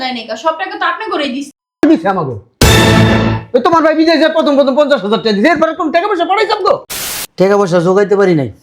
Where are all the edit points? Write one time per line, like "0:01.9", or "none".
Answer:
0:07.0